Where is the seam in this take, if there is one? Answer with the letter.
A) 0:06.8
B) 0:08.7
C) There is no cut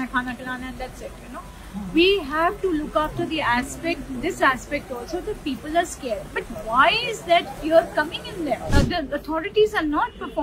B